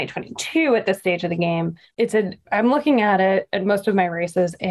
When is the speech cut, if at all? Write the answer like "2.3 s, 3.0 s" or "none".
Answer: 2.2 s